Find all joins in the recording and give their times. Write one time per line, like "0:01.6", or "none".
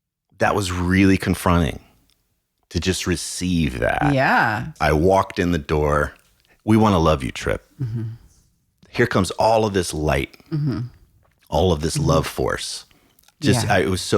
0:04.7
0:08.9
0:13.2